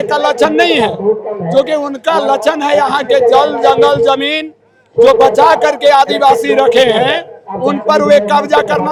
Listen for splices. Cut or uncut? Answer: uncut